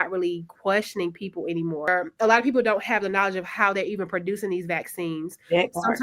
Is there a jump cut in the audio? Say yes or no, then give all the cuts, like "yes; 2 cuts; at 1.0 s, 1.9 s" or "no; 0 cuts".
yes; 1 cut; at 2.0 s